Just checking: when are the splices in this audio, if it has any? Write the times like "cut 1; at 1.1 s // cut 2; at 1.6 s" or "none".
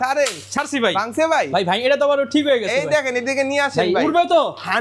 none

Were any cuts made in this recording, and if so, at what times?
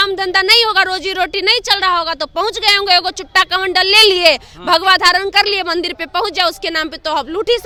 none

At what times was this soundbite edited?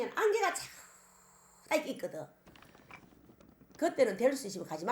none

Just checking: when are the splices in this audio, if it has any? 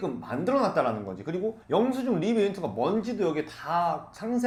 none

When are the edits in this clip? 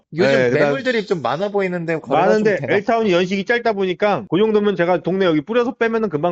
none

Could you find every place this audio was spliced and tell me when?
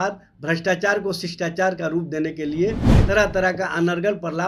none

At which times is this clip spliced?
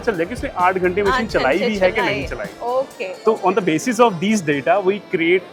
none

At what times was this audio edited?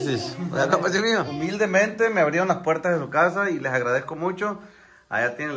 cut 1; at 1.3 s

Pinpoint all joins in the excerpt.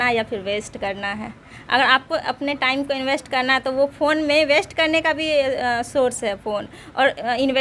none

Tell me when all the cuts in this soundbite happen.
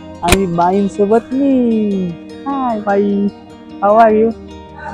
none

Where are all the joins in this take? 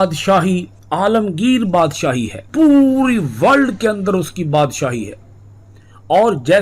cut 1; at 2.4 s

